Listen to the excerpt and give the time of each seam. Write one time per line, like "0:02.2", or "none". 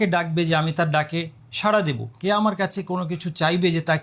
0:02.1